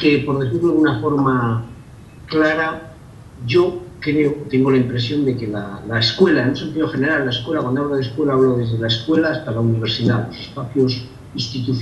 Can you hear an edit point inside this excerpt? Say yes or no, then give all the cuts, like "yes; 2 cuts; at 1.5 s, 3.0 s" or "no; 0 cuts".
no; 0 cuts